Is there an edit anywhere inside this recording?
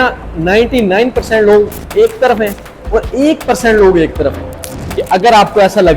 yes; 1 cut; at 4.7 s

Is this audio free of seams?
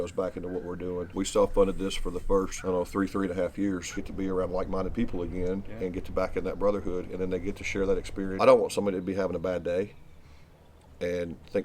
no; 4 cuts; at 1.1 s, 2.5 s, 4.0 s, 8.3 s

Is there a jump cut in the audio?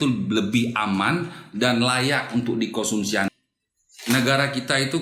yes; 1 cut; at 3.3 s

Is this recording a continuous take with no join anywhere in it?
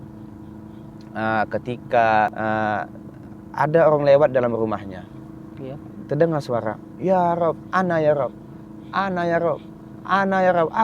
no; 1 cut; at 2.3 s

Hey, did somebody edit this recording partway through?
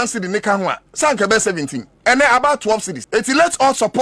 yes; 1 cut; at 3.0 s

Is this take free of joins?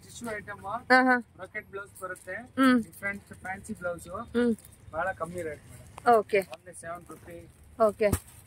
yes; 0 cuts

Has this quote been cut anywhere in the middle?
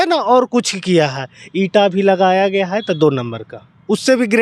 no; 0 cuts

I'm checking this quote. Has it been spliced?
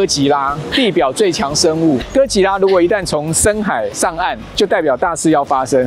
no; 0 cuts

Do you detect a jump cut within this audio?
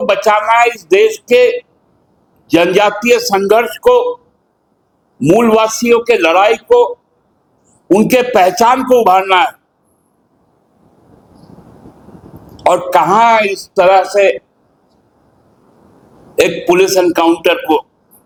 no; 0 cuts

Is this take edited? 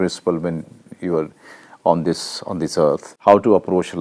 yes; 1 cut; at 3.1 s

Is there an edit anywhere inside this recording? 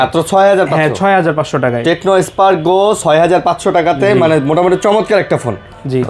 no; 0 cuts

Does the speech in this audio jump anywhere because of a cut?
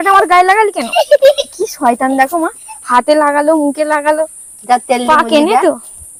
no; 0 cuts

